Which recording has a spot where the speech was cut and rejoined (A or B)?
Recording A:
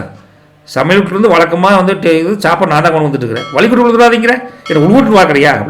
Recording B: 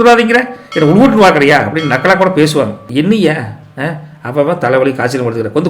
B